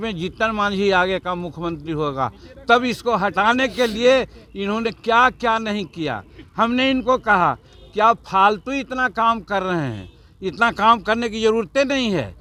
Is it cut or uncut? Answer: uncut